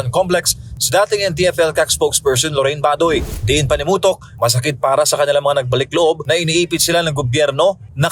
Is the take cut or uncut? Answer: cut